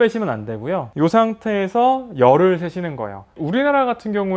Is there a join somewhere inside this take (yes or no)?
yes